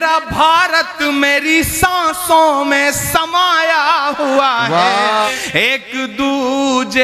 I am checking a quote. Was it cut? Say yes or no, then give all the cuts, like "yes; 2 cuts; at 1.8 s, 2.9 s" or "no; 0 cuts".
yes; 1 cut; at 5.2 s